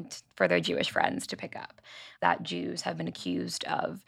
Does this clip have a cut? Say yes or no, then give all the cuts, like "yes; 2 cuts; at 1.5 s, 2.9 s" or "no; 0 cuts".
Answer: yes; 1 cut; at 2.1 s